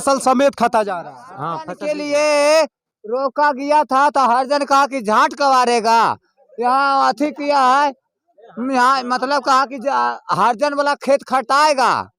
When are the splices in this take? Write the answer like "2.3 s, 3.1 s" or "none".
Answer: 1.7 s